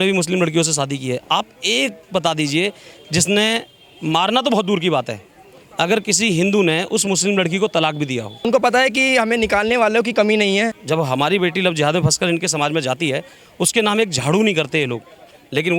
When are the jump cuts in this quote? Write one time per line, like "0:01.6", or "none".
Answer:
0:08.5
0:10.8